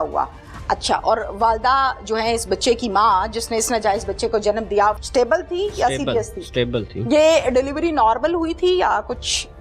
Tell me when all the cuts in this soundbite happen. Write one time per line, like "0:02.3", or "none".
0:05.0